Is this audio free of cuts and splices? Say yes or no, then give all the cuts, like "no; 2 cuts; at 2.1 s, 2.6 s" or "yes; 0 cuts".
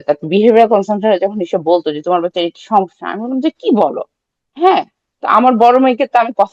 yes; 0 cuts